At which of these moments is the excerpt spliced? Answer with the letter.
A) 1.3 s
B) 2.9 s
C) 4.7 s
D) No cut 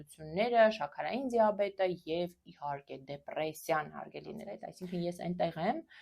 C